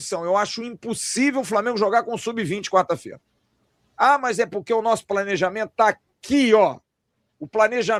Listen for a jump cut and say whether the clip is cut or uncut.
uncut